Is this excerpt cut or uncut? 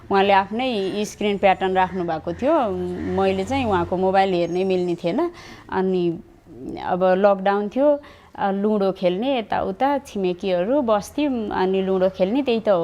uncut